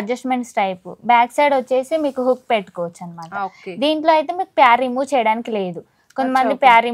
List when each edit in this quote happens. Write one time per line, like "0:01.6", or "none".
none